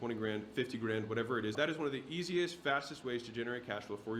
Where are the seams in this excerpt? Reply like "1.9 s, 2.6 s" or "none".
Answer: 1.5 s